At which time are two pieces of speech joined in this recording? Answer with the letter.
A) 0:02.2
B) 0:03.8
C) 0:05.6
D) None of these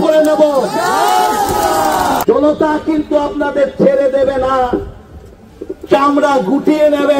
A